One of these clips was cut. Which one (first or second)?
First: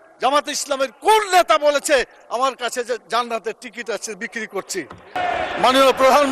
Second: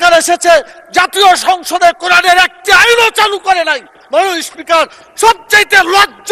first